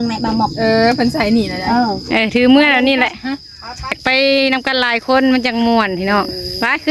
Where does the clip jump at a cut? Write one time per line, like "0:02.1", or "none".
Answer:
0:04.0

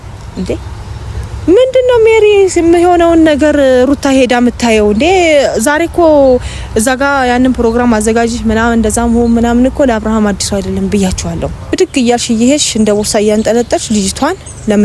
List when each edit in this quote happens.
0:11.5

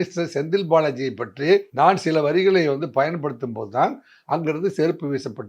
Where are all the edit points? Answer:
0:01.7

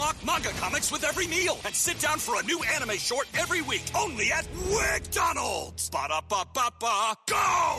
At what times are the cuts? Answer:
none

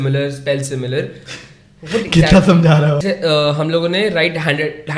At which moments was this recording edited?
0:03.0

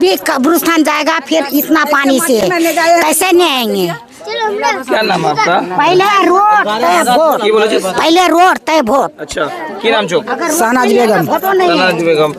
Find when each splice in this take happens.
none

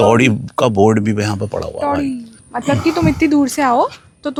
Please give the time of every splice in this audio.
none

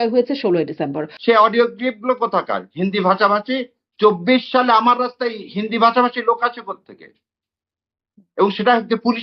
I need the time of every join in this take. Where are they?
0:01.1

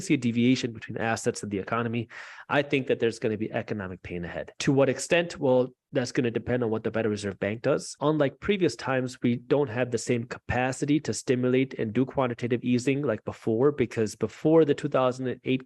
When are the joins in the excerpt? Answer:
0:04.5
0:07.9

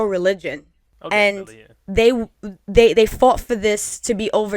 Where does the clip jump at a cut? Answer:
none

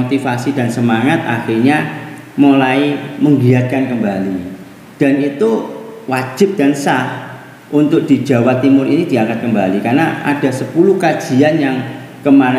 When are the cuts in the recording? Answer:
none

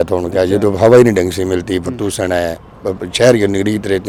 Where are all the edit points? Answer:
none

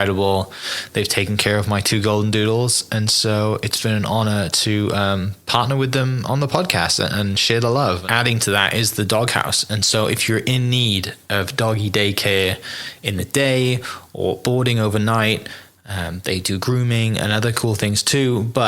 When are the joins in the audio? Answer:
0:08.0

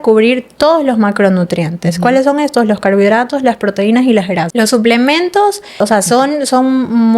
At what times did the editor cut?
0:04.5
0:05.8

